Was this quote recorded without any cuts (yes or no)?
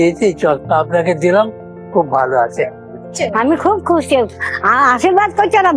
no